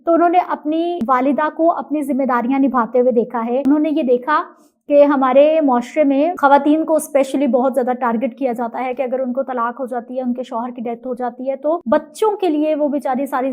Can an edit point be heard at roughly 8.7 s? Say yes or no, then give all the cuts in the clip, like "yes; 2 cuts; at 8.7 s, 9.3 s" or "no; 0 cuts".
no; 4 cuts; at 1.0 s, 3.6 s, 6.4 s, 11.8 s